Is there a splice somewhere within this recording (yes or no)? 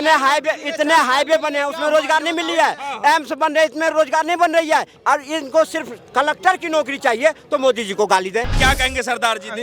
yes